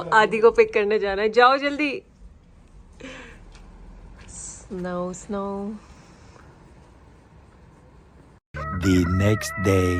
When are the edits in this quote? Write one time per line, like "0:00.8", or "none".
none